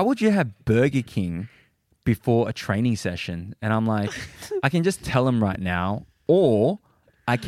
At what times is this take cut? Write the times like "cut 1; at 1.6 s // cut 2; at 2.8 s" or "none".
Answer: cut 1; at 6.1 s